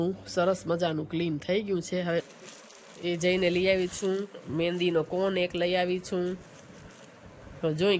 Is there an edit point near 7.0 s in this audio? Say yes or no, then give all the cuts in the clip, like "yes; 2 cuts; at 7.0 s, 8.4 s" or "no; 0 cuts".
no; 1 cut; at 2.2 s